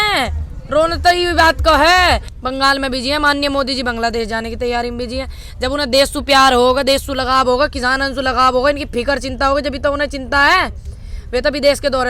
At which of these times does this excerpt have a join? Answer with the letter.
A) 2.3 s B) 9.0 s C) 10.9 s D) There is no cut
A